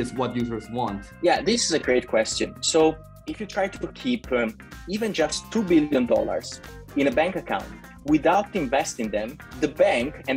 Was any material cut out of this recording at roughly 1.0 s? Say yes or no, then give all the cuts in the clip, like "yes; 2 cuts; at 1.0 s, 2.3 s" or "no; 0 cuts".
yes; 1 cut; at 1.0 s